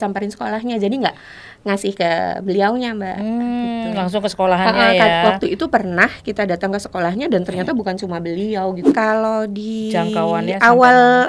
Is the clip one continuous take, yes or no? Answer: no